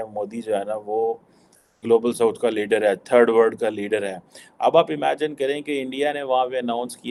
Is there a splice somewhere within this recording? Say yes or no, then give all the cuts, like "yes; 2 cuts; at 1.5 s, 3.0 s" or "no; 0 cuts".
no; 0 cuts